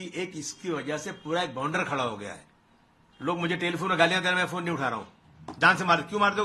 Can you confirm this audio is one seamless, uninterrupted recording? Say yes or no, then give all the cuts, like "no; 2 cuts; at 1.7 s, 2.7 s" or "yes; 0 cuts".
yes; 0 cuts